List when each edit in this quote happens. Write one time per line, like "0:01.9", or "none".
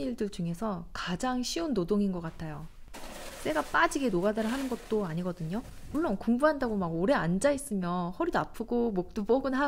none